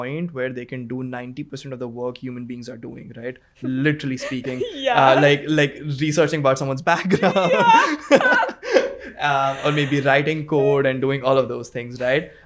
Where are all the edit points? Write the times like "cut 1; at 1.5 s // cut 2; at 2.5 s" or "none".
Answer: none